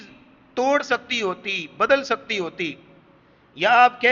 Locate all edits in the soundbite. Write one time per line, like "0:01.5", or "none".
none